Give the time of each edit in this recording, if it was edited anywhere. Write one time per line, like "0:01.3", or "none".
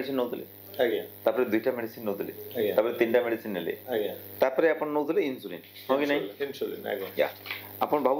none